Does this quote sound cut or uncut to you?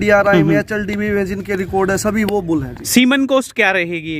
uncut